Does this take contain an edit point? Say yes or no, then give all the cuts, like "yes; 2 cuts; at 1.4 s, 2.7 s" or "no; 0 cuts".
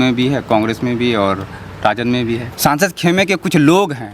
yes; 1 cut; at 2.4 s